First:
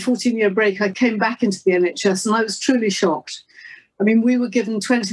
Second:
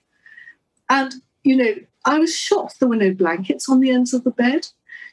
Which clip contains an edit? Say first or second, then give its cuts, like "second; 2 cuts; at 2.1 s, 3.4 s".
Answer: first; 1 cut; at 0.9 s